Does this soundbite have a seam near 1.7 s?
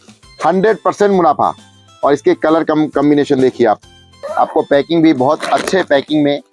no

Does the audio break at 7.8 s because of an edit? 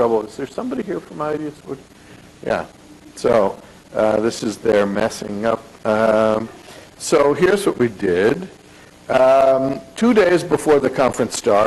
yes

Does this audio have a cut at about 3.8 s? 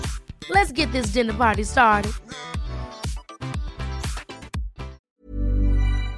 no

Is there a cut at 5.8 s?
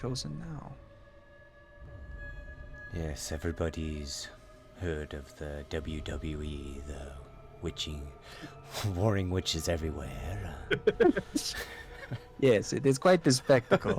no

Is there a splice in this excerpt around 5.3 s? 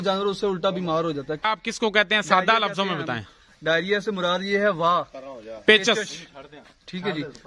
no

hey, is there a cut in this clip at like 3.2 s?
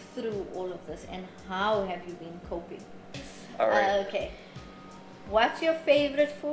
yes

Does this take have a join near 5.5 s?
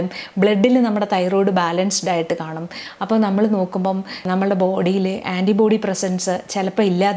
no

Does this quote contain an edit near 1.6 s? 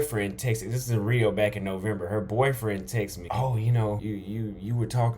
no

